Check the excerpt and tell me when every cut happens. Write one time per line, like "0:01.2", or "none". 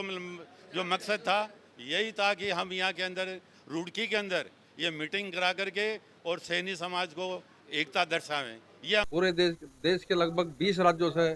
0:09.1